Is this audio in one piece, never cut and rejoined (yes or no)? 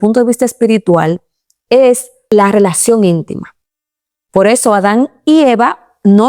no